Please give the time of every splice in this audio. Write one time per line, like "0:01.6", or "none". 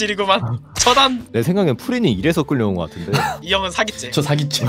0:01.2
0:03.4